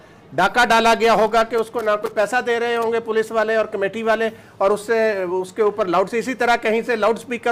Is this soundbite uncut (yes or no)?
yes